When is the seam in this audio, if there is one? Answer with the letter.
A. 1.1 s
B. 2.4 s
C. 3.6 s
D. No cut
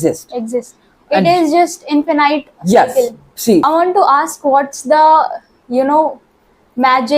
C